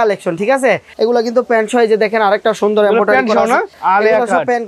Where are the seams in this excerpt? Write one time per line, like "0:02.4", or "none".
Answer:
0:00.9
0:03.8